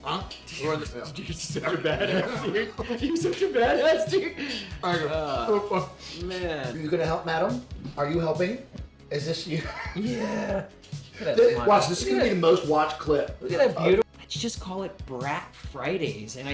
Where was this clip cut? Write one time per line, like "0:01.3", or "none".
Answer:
0:06.8
0:14.0